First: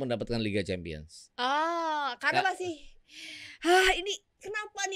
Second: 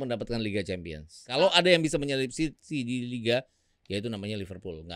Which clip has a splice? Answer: second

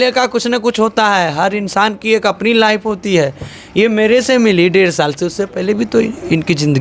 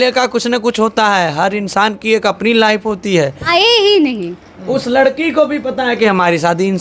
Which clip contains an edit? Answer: second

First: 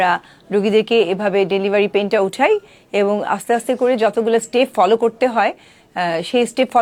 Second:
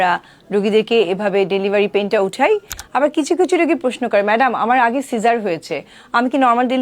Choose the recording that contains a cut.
second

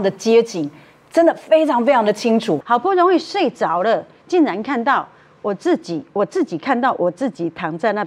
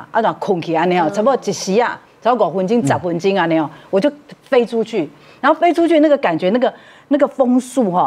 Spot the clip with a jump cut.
first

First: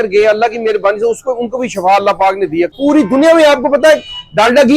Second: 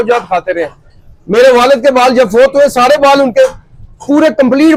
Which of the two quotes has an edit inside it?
first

